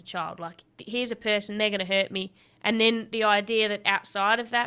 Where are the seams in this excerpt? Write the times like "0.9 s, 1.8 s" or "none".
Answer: none

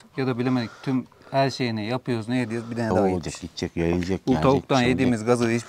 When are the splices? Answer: 3.0 s

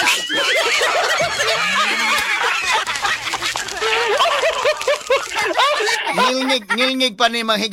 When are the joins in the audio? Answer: none

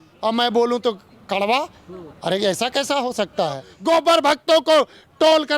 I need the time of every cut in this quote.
3.7 s

